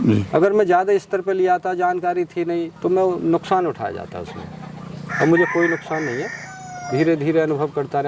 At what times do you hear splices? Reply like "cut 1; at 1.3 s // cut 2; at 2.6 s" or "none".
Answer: none

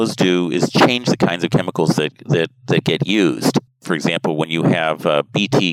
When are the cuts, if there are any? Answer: none

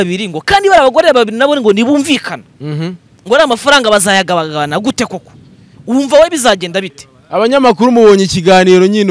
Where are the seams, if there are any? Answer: none

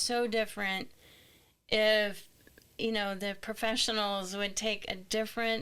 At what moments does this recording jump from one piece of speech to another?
none

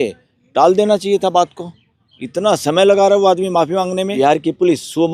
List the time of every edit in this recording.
cut 1; at 4.1 s

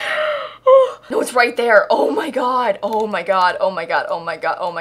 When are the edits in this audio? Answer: cut 1; at 1.0 s

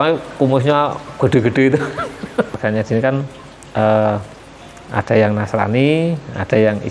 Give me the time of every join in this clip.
cut 1; at 2.5 s

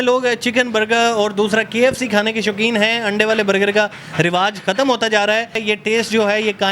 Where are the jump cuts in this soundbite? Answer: cut 1; at 5.6 s

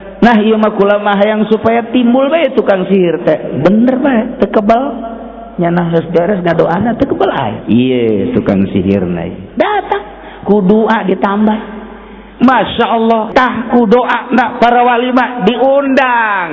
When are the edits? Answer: cut 1; at 13.3 s

